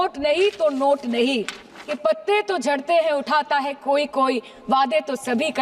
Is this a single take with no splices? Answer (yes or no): no